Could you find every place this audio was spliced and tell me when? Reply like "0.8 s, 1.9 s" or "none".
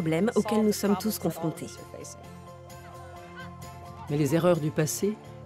4.4 s